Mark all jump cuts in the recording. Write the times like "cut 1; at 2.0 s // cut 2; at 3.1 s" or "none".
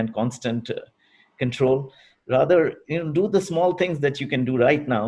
none